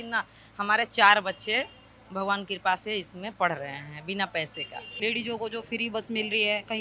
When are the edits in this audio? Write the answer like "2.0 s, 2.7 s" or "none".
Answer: 4.9 s

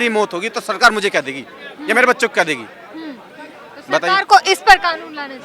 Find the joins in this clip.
none

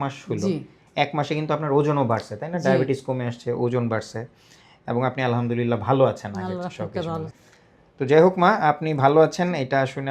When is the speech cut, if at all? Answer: 7.2 s

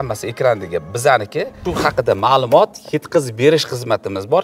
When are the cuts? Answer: 1.6 s

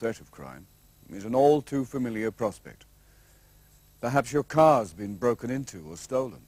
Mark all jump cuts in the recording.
4.3 s

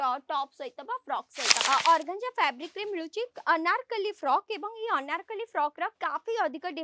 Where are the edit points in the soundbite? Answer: 1.6 s

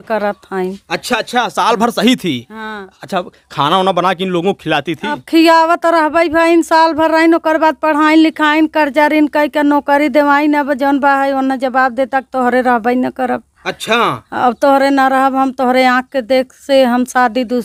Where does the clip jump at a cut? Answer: none

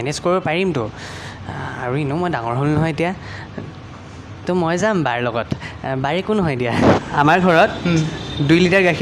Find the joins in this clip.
7.0 s

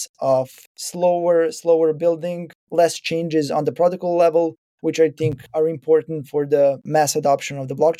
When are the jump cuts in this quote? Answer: 2.6 s, 6.8 s

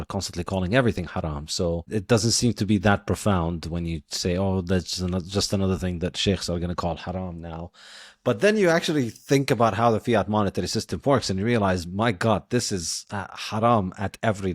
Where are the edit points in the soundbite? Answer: 1.9 s

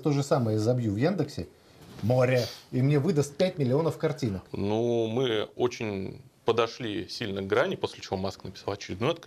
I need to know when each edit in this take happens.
4.5 s

